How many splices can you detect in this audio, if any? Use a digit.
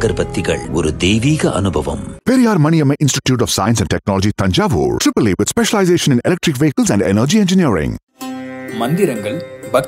0